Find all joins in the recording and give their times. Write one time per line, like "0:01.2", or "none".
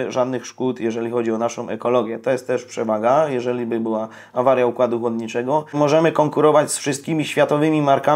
0:05.7